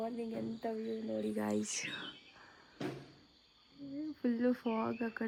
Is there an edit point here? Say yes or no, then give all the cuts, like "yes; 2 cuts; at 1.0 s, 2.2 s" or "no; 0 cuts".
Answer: no; 0 cuts